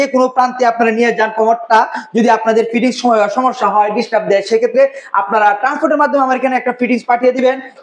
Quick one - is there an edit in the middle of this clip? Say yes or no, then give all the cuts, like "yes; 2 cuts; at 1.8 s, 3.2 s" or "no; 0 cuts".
no; 0 cuts